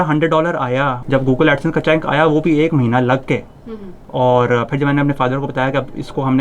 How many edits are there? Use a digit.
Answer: 1